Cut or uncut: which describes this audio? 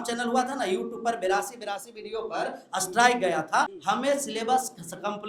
cut